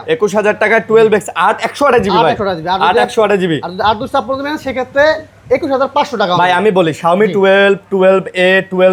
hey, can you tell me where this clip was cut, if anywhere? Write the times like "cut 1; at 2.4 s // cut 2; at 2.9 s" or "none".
none

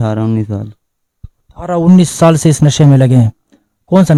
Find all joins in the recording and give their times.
none

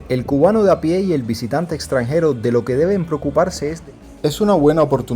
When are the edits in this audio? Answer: cut 1; at 3.8 s

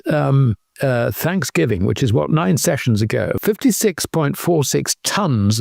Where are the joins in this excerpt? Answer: cut 1; at 3.4 s

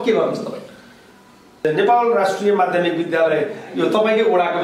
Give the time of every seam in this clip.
cut 1; at 1.6 s

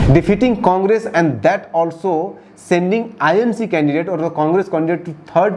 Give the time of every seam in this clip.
none

